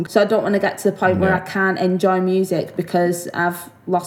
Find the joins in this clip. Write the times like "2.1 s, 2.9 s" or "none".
none